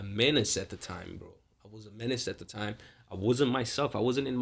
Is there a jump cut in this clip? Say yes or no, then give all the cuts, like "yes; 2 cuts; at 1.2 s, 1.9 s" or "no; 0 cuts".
no; 0 cuts